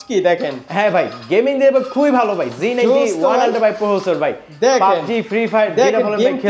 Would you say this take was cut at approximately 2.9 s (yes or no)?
no